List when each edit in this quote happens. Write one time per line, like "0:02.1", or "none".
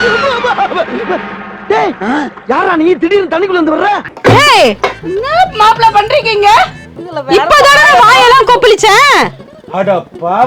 0:07.2